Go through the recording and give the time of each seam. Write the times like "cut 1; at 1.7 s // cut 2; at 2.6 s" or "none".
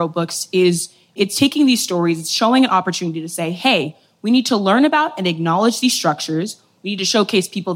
none